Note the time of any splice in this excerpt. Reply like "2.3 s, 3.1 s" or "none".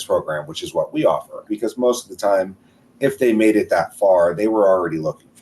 1.5 s